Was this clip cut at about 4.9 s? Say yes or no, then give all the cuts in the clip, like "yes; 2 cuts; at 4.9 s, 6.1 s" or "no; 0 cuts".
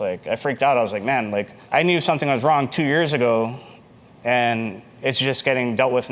no; 0 cuts